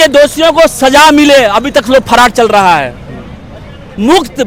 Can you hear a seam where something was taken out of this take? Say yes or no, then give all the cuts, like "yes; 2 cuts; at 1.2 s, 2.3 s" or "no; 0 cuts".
no; 0 cuts